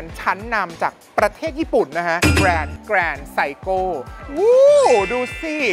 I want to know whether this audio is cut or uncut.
cut